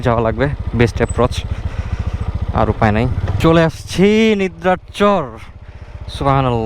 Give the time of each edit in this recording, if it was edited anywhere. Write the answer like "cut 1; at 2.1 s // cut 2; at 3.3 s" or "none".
none